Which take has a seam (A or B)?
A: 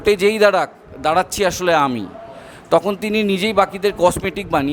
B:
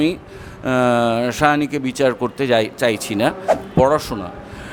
B